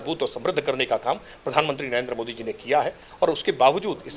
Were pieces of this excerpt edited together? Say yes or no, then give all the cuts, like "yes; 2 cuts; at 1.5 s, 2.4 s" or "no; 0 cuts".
no; 0 cuts